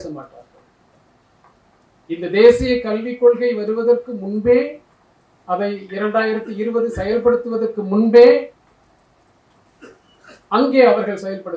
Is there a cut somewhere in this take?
no; 0 cuts

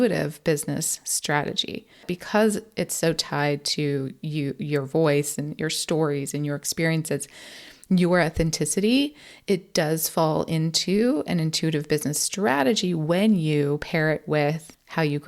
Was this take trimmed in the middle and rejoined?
yes; 1 cut; at 2.0 s

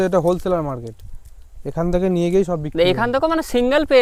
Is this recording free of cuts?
yes; 0 cuts

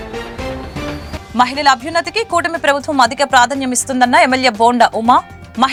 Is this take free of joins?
yes; 0 cuts

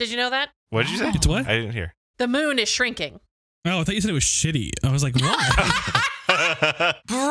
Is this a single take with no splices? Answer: yes; 0 cuts

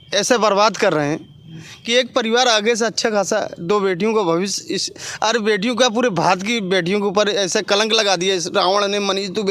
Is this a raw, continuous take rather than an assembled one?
yes; 0 cuts

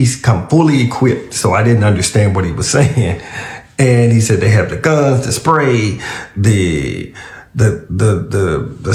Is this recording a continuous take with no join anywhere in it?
yes; 0 cuts

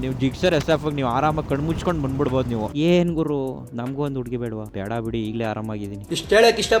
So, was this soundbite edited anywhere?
yes; 1 cut; at 2.7 s

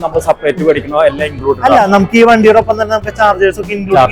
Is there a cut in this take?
no; 0 cuts

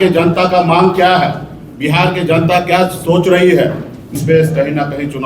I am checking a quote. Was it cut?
yes; 1 cut; at 4.1 s

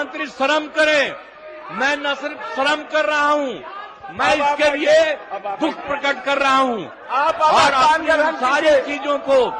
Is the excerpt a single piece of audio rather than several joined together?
yes; 0 cuts

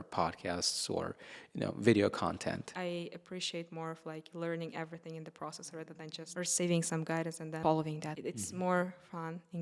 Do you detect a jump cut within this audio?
yes; 4 cuts; at 2.7 s, 6.3 s, 7.6 s, 8.1 s

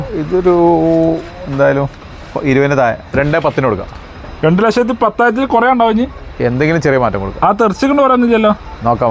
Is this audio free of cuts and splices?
no; 1 cut; at 3.0 s

